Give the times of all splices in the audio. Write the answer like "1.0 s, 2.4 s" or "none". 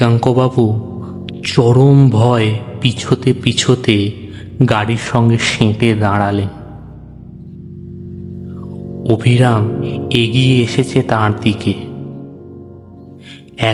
none